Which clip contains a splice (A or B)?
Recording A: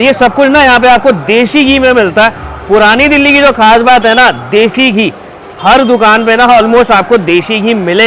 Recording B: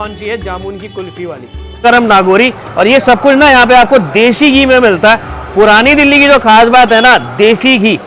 B